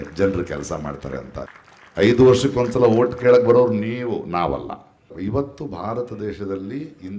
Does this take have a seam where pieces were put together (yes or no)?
yes